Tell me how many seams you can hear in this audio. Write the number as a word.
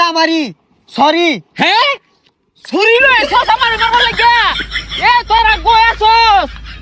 zero